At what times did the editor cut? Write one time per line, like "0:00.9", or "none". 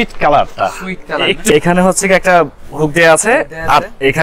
0:01.5